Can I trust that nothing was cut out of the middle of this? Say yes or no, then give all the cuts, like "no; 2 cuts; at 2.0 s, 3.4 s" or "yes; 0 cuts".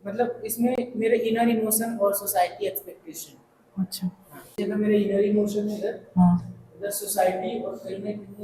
yes; 0 cuts